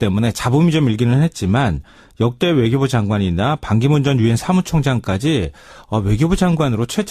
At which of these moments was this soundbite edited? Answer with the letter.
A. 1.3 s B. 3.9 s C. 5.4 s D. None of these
B